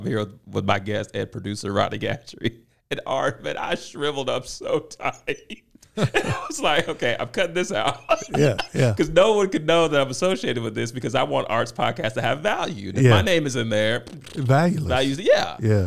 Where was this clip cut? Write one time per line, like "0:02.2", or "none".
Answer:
none